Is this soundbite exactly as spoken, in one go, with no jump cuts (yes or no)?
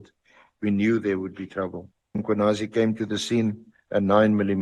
no